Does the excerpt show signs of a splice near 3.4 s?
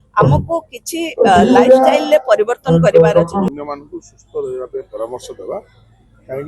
yes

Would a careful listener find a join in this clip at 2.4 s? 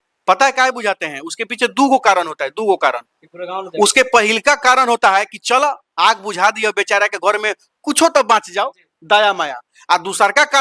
no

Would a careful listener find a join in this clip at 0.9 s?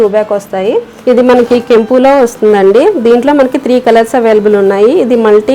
yes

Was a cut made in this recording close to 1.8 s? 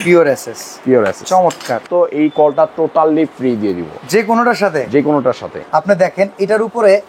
yes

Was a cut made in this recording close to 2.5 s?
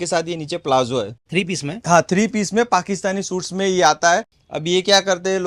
no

